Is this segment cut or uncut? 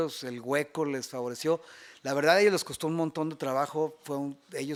uncut